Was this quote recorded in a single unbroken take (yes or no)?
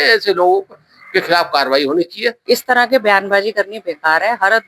no